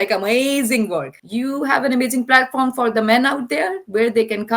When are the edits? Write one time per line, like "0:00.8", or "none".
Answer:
0:01.2